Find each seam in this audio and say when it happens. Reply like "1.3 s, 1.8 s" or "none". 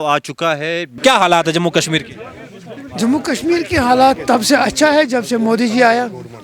0.9 s

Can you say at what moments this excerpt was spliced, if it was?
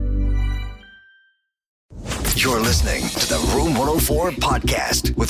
1.9 s

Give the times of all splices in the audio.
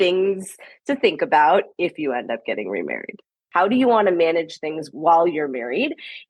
3.4 s, 4.9 s

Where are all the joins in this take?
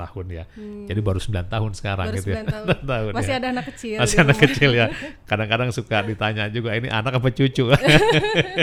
none

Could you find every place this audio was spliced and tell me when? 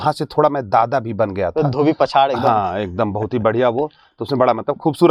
none

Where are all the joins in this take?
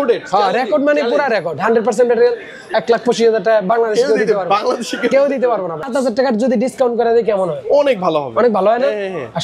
5.8 s

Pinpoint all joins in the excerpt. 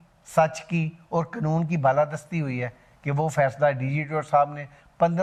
none

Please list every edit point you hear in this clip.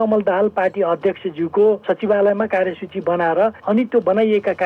1.8 s, 3.6 s

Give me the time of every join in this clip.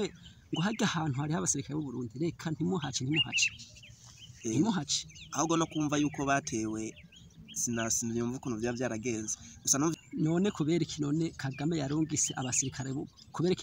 10.0 s

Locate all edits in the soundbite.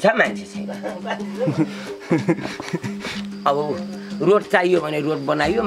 3.2 s

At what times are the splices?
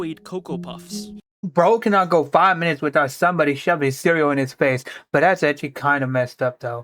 1.2 s

